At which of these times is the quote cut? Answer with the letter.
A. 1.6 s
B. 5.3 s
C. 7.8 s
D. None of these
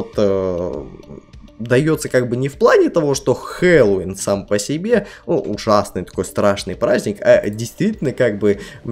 D